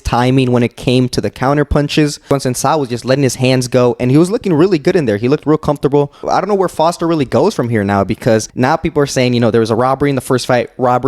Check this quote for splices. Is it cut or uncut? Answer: cut